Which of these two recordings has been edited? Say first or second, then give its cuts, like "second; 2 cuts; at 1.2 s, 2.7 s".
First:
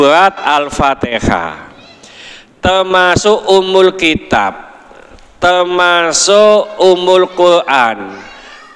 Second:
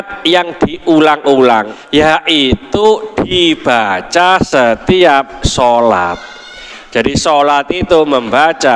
second; 1 cut; at 1.8 s